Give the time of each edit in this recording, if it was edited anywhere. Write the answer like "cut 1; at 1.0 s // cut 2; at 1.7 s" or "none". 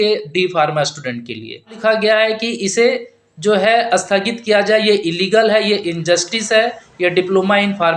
cut 1; at 1.8 s